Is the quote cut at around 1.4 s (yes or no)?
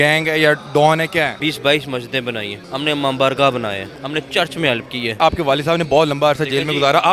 yes